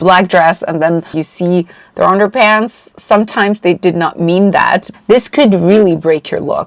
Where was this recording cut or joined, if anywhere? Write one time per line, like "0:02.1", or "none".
0:01.2
0:04.9